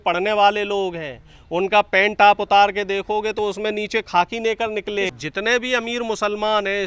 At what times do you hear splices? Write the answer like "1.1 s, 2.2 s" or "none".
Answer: 5.1 s